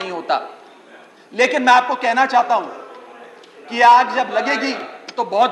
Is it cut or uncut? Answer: uncut